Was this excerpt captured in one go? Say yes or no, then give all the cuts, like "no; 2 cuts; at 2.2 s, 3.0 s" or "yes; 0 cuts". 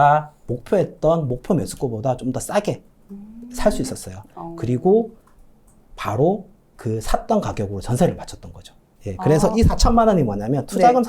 yes; 0 cuts